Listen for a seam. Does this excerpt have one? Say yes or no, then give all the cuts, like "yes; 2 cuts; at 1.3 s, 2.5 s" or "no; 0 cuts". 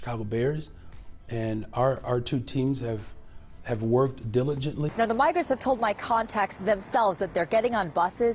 yes; 1 cut; at 4.9 s